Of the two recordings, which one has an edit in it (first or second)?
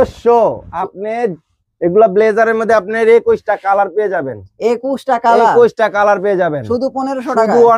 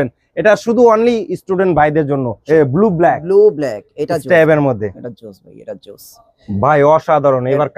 second